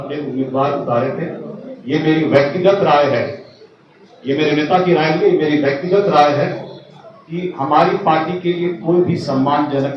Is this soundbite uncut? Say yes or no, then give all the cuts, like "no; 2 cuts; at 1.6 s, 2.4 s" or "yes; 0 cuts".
yes; 0 cuts